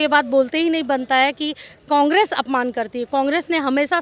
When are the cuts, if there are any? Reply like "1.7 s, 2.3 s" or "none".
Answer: none